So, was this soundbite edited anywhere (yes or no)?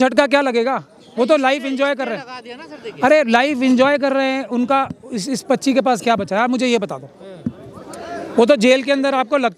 no